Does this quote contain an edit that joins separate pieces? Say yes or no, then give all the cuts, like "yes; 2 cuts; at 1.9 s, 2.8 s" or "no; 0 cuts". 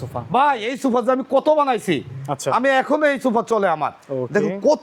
no; 0 cuts